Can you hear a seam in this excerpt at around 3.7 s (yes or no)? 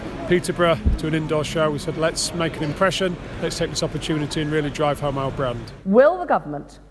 no